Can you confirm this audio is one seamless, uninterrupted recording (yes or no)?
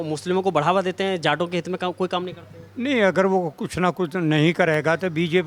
yes